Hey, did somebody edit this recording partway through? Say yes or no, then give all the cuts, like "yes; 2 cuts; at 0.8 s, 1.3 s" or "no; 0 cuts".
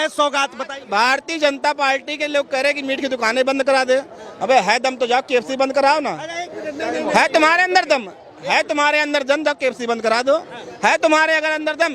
no; 0 cuts